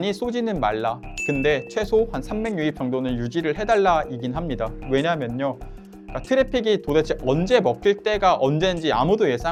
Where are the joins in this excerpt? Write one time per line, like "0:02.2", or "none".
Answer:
none